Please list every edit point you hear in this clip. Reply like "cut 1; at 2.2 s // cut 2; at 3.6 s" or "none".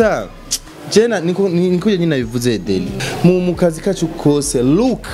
cut 1; at 3.0 s